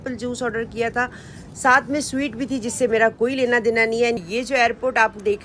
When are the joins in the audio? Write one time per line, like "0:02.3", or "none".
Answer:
0:04.2